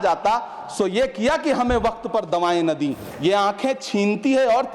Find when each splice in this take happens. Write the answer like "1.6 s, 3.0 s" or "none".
3.1 s

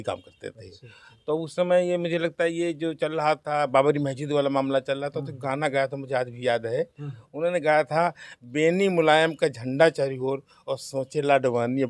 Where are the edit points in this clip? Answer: none

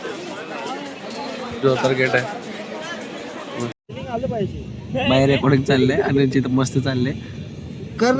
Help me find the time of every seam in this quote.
3.8 s

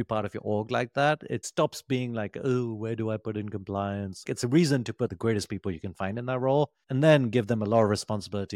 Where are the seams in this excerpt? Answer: 1.4 s, 4.3 s

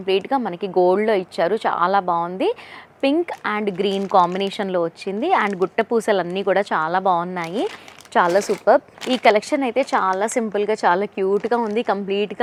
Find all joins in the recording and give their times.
none

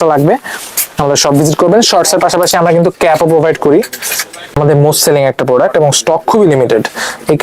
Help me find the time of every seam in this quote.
4.5 s

